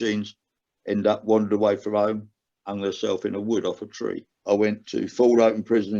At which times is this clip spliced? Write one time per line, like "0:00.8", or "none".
0:04.4

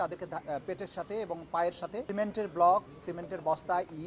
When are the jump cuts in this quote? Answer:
0:02.1
0:03.0

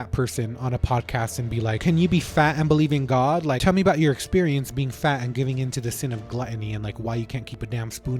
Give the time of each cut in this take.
0:01.8
0:03.6

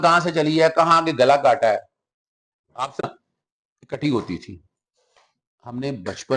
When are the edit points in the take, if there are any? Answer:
0:03.0

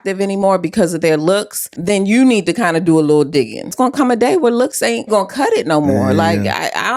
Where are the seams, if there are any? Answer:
0:01.6
0:03.7
0:05.1

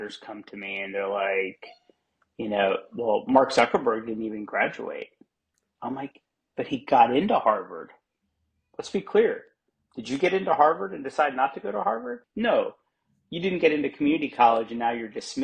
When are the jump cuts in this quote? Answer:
0:12.2

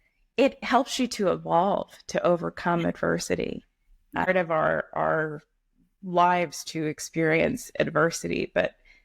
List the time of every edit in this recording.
0:04.3

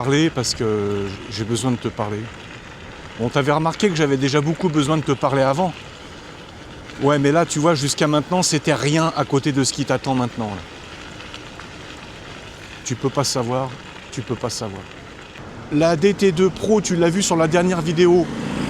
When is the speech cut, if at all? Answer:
0:15.4

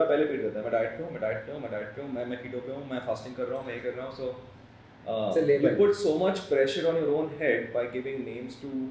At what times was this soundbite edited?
none

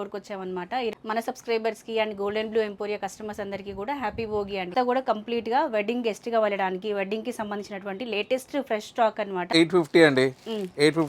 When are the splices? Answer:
0:00.9
0:04.7
0:09.5

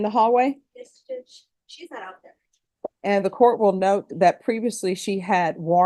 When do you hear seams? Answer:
0:03.0

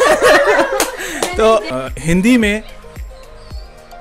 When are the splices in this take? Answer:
0:01.6

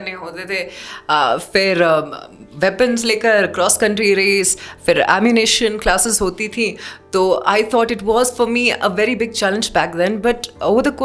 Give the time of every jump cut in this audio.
none

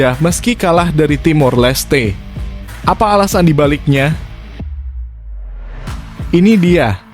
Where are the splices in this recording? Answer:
0:04.7
0:06.3

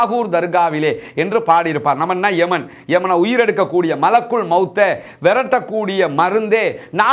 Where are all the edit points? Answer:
none

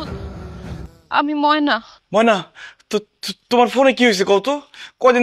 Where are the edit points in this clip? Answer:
0:00.9
0:01.9

